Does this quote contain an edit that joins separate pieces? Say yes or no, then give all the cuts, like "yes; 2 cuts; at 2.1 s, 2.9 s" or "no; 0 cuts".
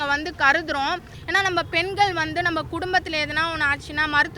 yes; 1 cut; at 1.2 s